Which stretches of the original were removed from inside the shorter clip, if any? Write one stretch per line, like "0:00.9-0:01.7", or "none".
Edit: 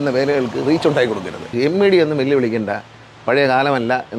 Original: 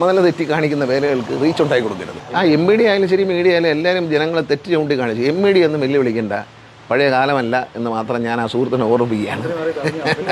0:02.2-0:05.1